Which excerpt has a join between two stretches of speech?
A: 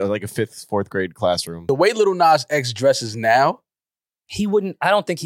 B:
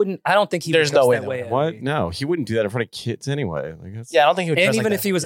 A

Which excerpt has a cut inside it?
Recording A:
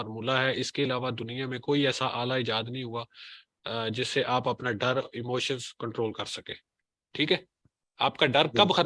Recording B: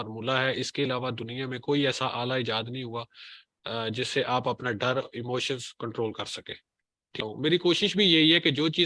B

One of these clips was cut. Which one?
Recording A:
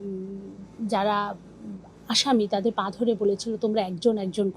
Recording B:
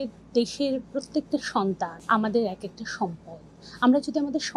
B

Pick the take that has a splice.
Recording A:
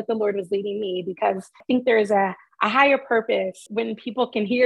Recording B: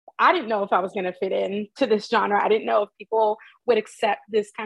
A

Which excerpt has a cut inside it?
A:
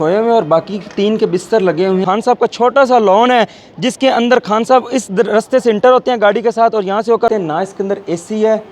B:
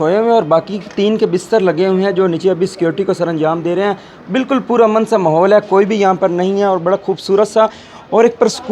A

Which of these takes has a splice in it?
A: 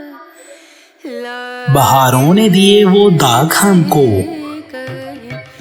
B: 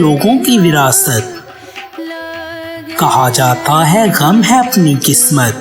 A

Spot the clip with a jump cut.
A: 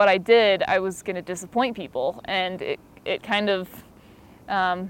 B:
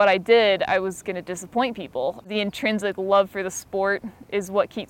B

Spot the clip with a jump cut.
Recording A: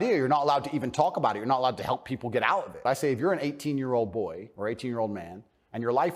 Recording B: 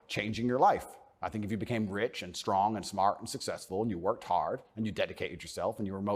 A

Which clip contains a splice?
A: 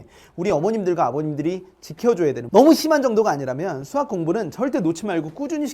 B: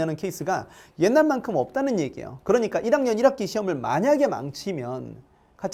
A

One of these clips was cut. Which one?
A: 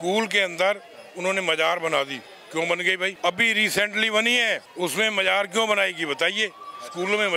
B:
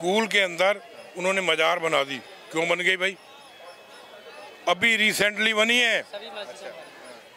A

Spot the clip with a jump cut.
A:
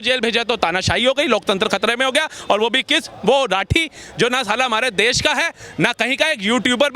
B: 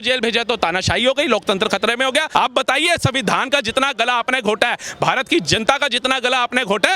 B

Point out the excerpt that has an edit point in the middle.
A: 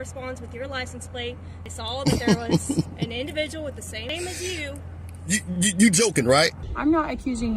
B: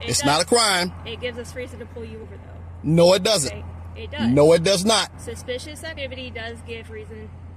A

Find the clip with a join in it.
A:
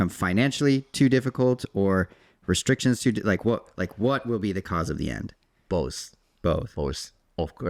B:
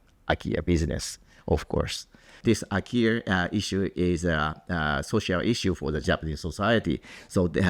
B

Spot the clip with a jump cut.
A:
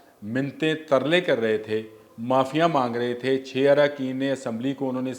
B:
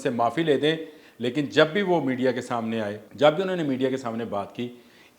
B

